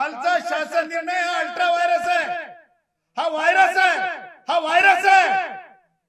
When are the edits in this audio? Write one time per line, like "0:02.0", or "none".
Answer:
none